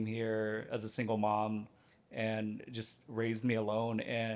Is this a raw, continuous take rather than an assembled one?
yes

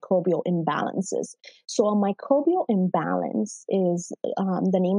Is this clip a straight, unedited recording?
yes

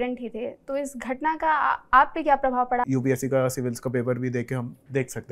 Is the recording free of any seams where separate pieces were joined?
no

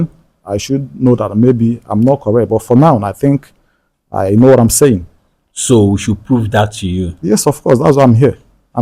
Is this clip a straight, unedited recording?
yes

